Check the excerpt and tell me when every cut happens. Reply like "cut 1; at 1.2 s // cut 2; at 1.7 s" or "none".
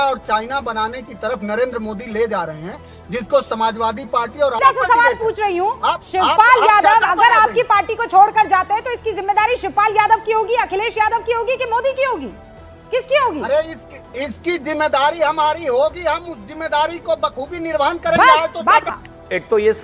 cut 1; at 4.6 s // cut 2; at 18.9 s